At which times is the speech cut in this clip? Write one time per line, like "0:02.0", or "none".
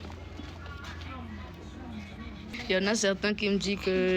0:02.5